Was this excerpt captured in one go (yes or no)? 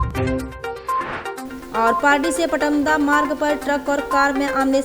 no